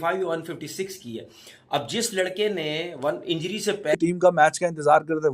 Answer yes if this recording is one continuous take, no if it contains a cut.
no